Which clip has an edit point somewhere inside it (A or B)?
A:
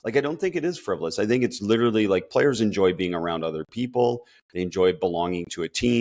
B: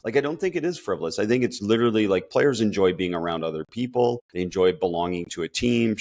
B